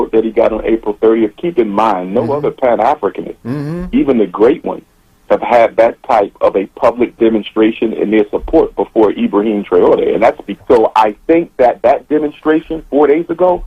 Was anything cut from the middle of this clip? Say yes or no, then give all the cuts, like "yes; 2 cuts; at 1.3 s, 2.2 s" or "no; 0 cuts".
yes; 1 cut; at 10.5 s